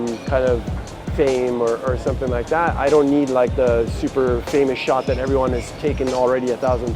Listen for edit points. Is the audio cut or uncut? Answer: uncut